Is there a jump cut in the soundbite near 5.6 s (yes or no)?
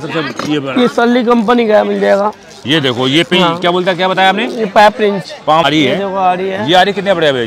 yes